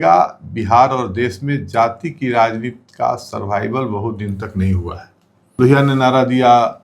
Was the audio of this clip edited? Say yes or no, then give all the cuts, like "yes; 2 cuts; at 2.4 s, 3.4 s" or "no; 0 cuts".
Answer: yes; 1 cut; at 5.5 s